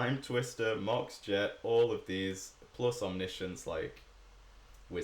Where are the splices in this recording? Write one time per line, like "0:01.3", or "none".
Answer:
none

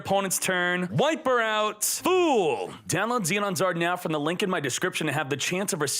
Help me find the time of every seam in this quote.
0:00.9
0:01.9
0:02.8

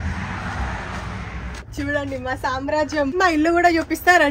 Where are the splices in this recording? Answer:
0:01.6
0:03.2

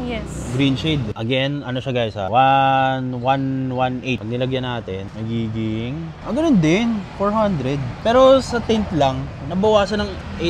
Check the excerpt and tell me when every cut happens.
0:01.1

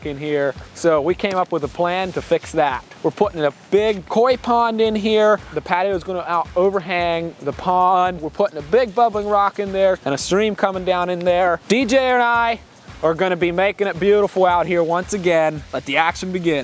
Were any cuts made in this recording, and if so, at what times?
0:04.1
0:05.5
0:10.0
0:15.6

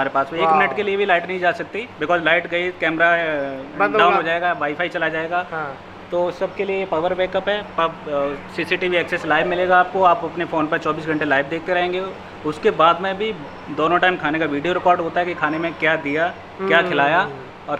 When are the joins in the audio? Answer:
none

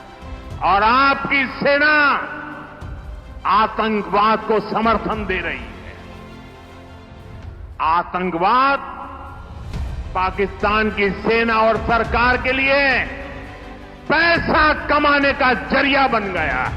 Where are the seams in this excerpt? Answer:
0:06.0
0:07.6

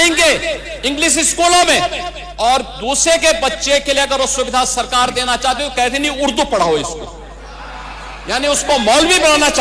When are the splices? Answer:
none

